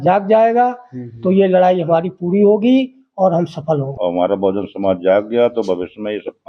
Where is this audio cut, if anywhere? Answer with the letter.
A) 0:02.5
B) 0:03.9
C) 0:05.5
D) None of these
B